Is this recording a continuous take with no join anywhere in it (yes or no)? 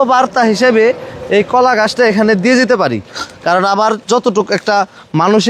yes